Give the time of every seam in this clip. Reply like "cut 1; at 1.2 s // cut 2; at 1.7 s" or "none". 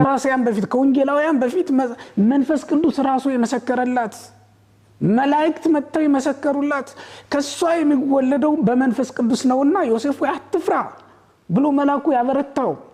none